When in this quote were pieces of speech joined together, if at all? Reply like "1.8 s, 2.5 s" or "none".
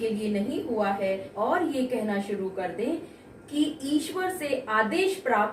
1.6 s